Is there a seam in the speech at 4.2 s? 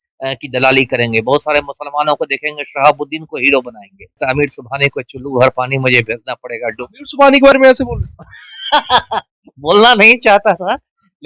yes; 1 cut; at 4.2 s

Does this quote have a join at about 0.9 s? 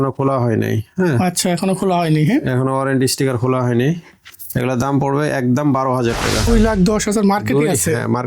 no; 1 cut; at 6.5 s

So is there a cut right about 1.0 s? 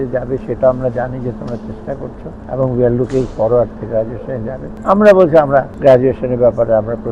no; 3 cuts; at 2.3 s, 4.6 s, 5.7 s

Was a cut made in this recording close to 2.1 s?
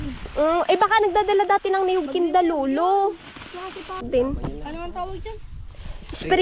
no; 1 cut; at 4.0 s

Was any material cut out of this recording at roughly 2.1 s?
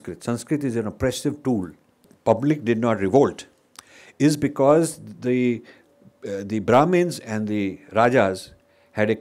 yes; 1 cut; at 2.1 s

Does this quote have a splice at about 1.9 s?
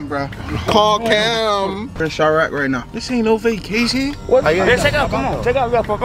yes; 2 cuts; at 1.9 s, 4.4 s

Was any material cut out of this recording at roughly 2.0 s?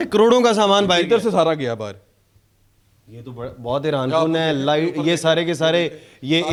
no; 0 cuts

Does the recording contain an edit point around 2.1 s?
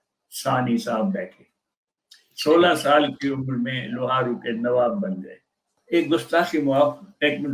no; 1 cut; at 5.7 s

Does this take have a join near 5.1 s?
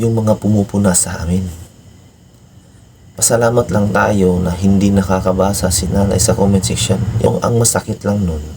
no; 1 cut; at 7.3 s

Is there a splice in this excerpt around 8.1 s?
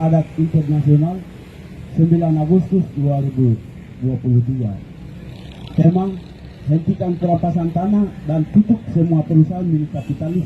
no; 0 cuts

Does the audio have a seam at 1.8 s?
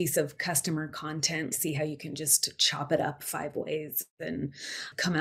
no; 0 cuts

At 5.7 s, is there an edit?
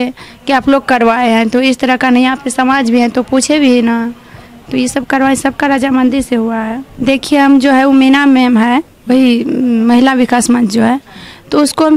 no; 1 cut; at 6.9 s

